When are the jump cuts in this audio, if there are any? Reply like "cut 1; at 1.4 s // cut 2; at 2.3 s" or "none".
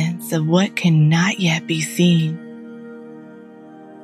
none

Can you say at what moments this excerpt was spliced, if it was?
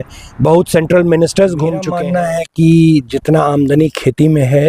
cut 1; at 1.9 s

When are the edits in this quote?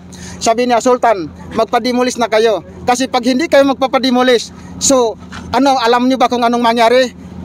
none

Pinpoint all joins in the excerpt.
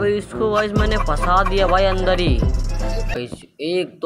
cut 1; at 3.2 s

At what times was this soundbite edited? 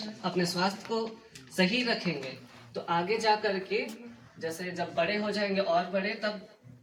none

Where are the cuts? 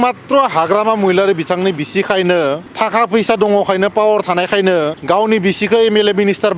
cut 1; at 2.7 s // cut 2; at 5.0 s

